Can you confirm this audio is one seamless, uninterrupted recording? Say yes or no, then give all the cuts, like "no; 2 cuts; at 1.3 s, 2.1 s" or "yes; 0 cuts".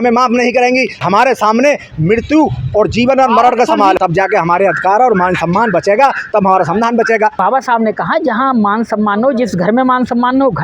no; 3 cuts; at 1.0 s, 4.0 s, 7.3 s